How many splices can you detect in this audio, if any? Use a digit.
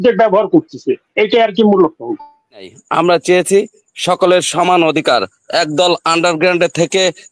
1